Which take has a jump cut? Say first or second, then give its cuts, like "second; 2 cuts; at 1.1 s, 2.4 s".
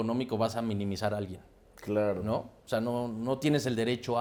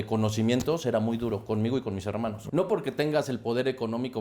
second; 1 cut; at 2.4 s